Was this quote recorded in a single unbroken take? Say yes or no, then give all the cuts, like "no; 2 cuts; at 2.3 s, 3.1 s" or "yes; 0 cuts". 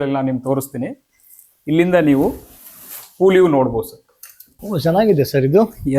no; 1 cut; at 4.5 s